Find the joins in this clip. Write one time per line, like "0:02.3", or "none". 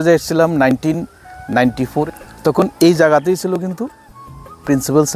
0:02.1